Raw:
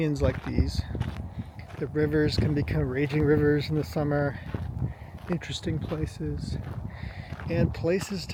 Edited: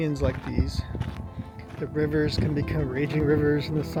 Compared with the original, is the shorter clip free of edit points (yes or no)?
yes